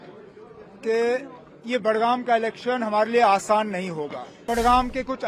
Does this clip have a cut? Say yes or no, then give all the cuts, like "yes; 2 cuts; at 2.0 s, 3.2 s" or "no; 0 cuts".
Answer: yes; 1 cut; at 4.3 s